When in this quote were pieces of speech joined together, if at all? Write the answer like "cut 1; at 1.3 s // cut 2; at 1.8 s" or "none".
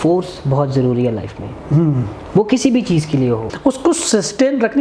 cut 1; at 3.5 s